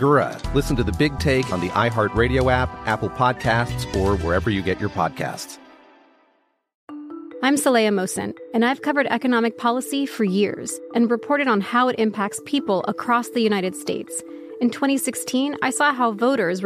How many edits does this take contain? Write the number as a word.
one